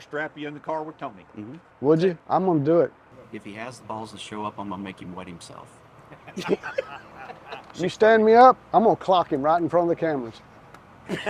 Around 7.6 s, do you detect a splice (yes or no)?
yes